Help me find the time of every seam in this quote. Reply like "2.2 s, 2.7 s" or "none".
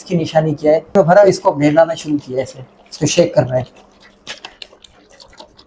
1.0 s, 4.1 s